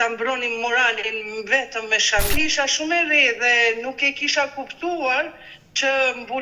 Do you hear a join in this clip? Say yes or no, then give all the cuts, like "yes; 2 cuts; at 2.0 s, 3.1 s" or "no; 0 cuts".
yes; 1 cut; at 2.4 s